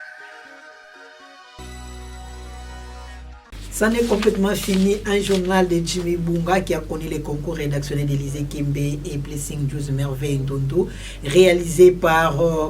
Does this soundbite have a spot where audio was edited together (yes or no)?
no